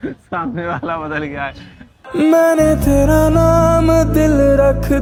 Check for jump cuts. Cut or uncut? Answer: uncut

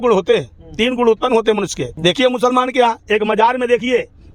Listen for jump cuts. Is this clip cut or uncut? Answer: cut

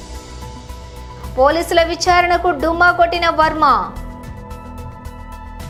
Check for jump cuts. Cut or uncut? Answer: uncut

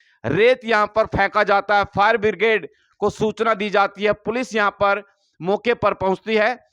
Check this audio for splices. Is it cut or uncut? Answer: uncut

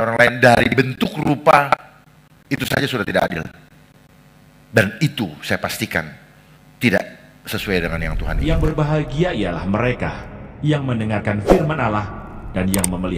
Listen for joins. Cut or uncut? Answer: cut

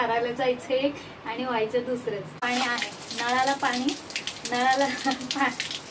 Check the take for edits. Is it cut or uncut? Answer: cut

